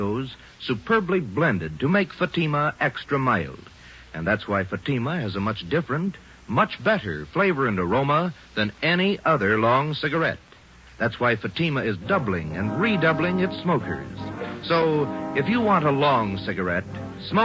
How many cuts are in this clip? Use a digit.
1